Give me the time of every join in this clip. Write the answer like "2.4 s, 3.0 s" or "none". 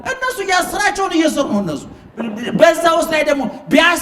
none